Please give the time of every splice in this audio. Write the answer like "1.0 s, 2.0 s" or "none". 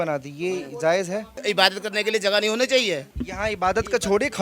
1.4 s, 3.2 s

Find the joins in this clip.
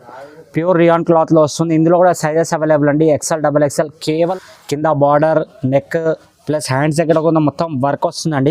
4.3 s

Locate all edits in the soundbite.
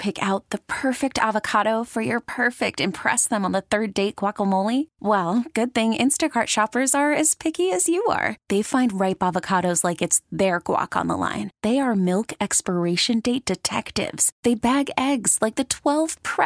none

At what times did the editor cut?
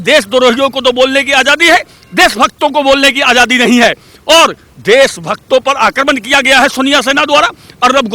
none

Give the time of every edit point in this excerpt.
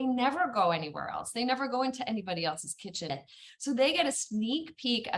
3.1 s

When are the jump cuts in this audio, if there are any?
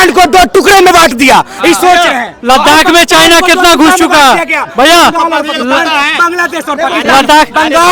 none

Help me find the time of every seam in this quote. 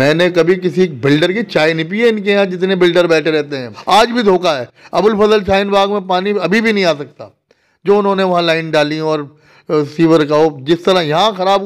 3.8 s

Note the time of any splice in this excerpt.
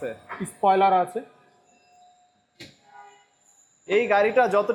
none

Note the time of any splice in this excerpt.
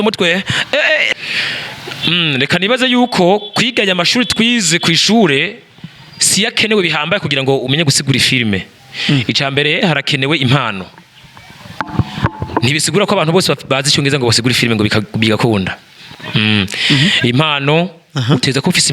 1.1 s

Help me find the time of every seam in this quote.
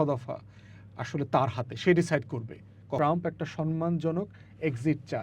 3.0 s

